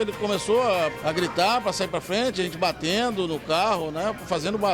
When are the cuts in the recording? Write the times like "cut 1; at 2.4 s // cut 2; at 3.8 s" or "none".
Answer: cut 1; at 1.0 s